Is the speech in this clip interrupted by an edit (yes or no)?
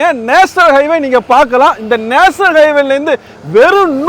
no